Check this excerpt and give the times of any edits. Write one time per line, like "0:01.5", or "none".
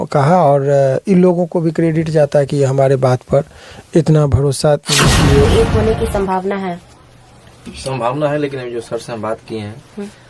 0:05.5